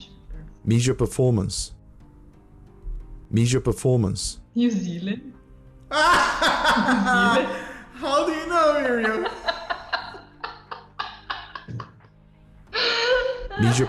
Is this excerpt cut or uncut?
uncut